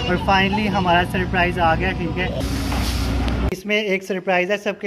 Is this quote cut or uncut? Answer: cut